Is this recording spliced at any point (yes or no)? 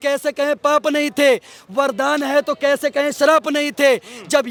no